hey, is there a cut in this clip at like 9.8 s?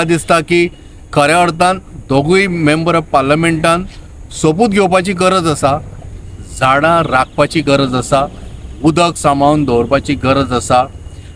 no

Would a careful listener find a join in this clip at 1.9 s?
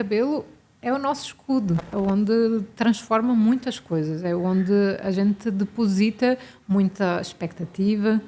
yes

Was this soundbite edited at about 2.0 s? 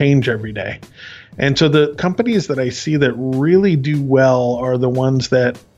yes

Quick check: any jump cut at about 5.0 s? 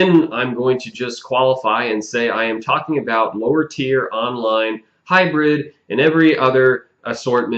no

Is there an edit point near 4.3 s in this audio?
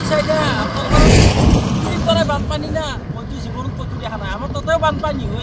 no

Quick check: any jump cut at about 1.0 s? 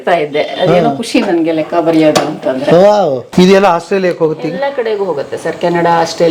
no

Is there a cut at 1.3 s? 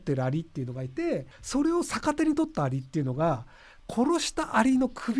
yes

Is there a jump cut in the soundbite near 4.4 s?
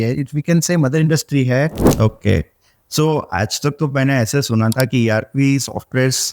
no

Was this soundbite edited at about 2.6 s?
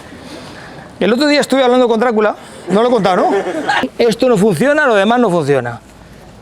no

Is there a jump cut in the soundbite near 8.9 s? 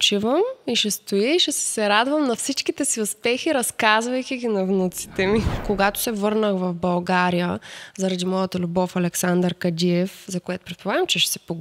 no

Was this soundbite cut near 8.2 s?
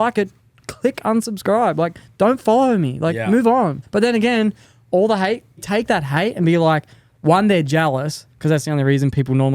yes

